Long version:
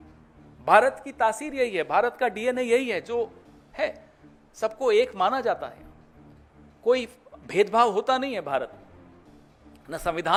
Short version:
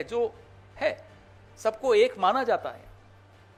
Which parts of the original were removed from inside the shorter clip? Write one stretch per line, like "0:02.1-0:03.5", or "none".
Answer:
none